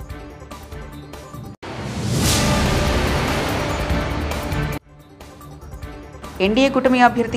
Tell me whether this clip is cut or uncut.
cut